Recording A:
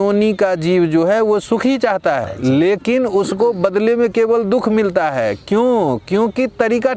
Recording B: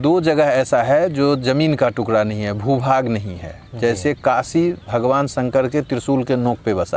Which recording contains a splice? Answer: A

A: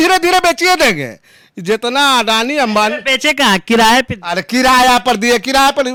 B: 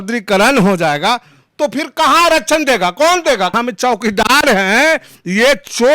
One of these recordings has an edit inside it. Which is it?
B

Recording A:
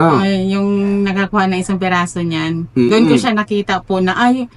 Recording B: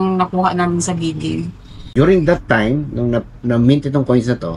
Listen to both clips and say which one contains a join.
B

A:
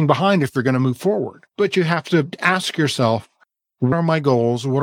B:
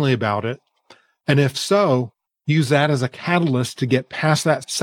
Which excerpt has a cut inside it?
A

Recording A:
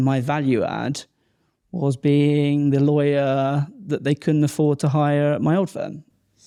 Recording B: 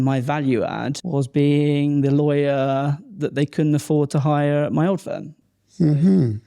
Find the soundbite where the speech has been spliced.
B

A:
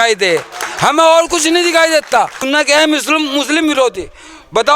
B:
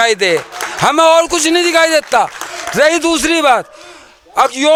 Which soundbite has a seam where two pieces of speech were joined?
A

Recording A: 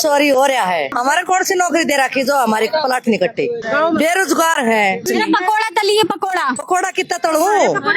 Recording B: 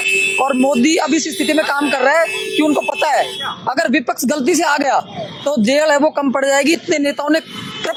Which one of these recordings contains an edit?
A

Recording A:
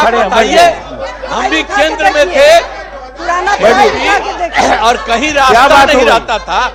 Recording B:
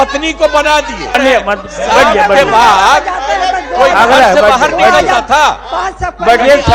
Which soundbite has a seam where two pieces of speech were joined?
B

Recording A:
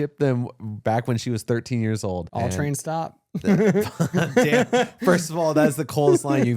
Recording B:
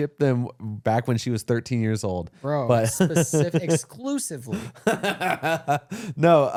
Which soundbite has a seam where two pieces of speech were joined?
A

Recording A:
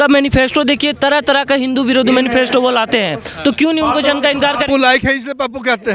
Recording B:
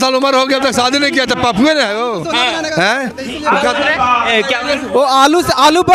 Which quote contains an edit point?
A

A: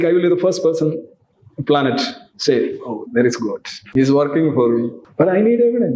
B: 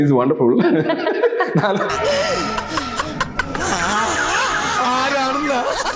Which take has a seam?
A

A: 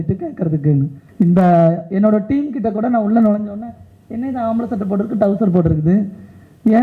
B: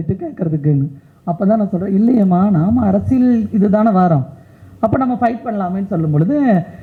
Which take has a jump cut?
A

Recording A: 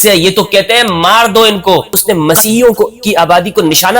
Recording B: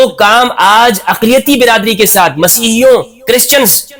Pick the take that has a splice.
A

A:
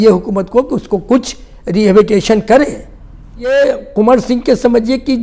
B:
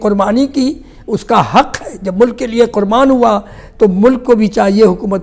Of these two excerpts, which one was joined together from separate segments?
A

